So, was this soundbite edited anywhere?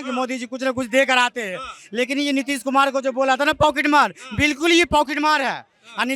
no; 0 cuts

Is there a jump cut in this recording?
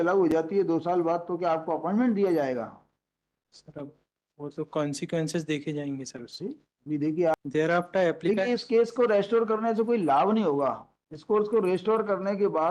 yes; 1 cut; at 7.3 s

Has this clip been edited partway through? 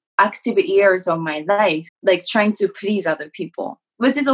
yes; 1 cut; at 1.9 s

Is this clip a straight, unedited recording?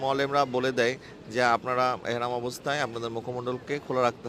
yes; 0 cuts

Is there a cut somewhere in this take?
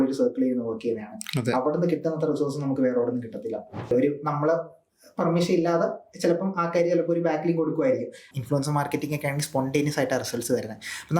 yes; 2 cuts; at 3.9 s, 8.2 s

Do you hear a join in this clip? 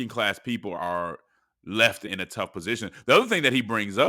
yes; 2 cuts; at 0.8 s, 2.0 s

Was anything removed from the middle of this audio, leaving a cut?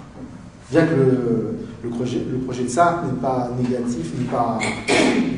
no; 0 cuts

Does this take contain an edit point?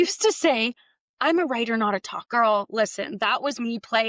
yes; 1 cut; at 2.2 s

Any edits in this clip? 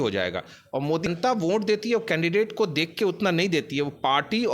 yes; 1 cut; at 1.1 s

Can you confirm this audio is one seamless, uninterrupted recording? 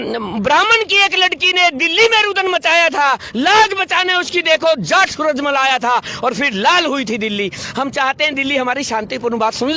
yes; 0 cuts

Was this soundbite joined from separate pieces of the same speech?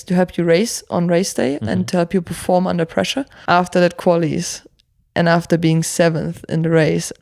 yes; 1 cut; at 3.3 s

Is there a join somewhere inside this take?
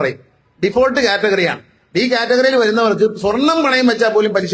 no; 0 cuts

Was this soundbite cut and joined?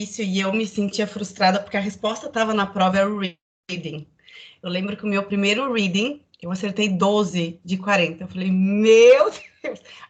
no; 0 cuts

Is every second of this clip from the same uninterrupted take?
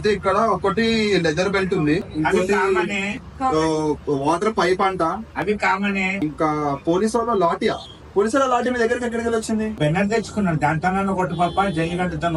yes; 0 cuts

